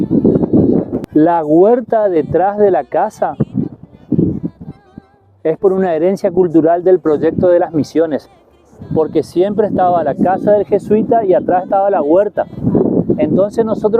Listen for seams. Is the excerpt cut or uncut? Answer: cut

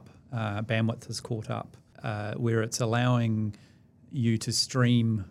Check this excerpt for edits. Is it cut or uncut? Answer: cut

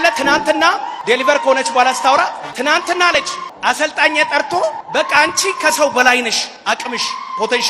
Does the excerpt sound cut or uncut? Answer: cut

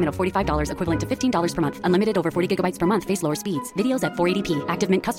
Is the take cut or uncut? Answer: uncut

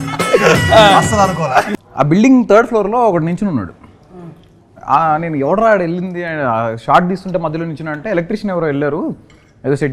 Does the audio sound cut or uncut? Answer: cut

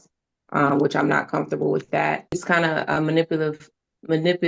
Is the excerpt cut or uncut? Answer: cut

